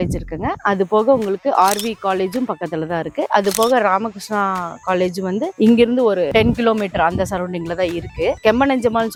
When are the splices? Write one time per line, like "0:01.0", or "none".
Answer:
none